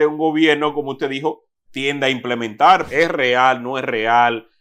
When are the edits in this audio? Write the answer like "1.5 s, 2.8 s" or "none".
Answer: 2.9 s

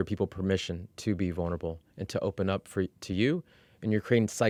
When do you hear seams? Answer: none

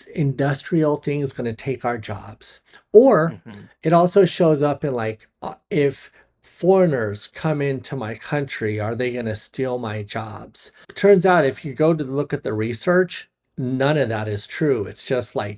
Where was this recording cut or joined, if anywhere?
10.9 s

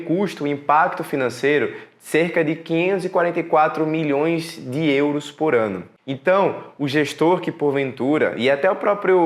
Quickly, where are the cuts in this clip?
none

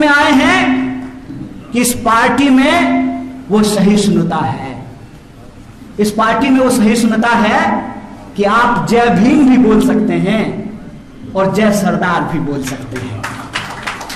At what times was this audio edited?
none

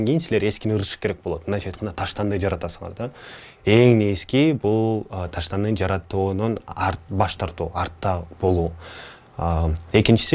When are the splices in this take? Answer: none

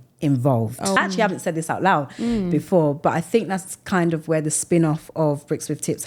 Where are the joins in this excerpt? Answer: 1.0 s

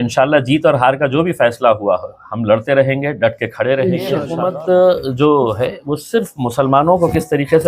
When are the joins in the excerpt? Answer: 4.3 s

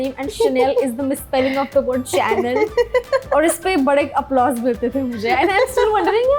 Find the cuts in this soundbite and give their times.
none

